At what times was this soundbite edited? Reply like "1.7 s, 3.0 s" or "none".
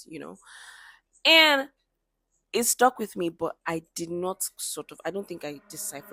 none